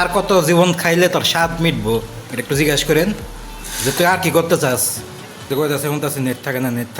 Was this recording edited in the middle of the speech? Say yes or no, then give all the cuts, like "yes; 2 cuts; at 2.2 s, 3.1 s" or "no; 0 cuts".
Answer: yes; 1 cut; at 5.5 s